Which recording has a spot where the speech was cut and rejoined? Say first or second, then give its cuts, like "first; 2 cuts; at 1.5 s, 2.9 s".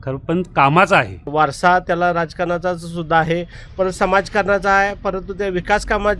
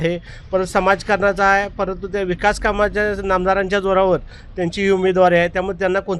first; 1 cut; at 1.3 s